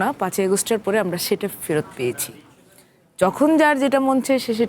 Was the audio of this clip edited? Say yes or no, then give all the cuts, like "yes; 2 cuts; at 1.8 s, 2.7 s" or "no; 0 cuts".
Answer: no; 0 cuts